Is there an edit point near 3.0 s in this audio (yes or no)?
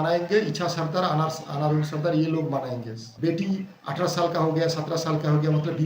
yes